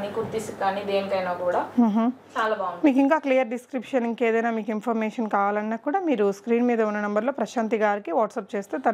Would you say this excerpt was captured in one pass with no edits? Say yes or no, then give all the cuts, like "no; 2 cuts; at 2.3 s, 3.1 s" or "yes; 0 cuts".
yes; 0 cuts